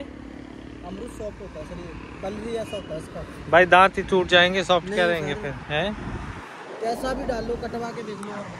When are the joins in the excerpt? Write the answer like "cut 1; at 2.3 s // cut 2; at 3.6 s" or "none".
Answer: none